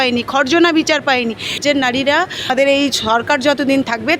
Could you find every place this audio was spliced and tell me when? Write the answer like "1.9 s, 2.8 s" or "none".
1.6 s, 2.5 s